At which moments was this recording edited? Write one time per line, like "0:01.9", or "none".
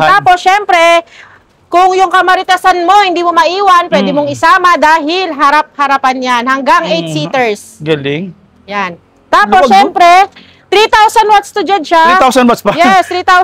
none